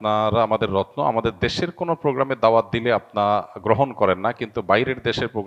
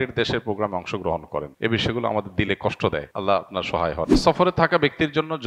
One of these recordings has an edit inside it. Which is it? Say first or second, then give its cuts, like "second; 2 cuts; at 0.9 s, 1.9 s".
second; 3 cuts; at 1.5 s, 3.1 s, 4.2 s